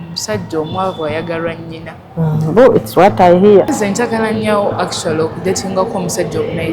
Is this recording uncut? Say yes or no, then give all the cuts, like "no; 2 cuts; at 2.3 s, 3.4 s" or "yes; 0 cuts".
no; 1 cut; at 3.7 s